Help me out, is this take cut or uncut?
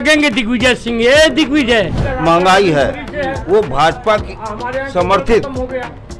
cut